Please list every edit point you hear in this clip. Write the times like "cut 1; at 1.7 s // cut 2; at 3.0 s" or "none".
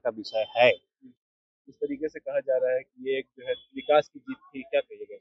none